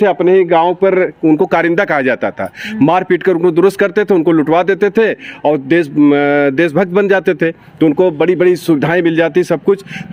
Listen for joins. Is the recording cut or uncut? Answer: uncut